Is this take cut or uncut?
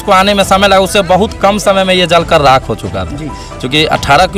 uncut